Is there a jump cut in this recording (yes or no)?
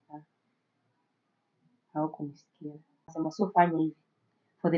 yes